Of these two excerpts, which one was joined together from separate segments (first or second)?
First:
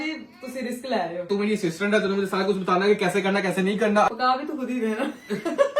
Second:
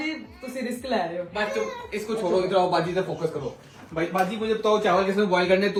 first